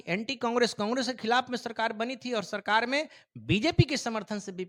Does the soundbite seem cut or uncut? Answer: uncut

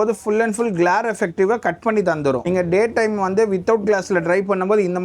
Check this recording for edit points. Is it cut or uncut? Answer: cut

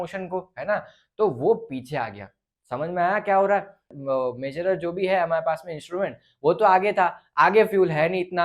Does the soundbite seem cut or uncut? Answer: cut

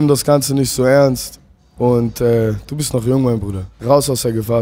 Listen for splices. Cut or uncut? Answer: cut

